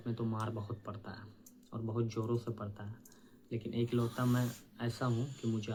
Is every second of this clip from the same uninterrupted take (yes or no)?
yes